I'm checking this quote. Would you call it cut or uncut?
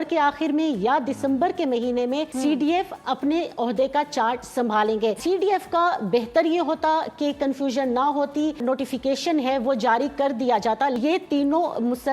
cut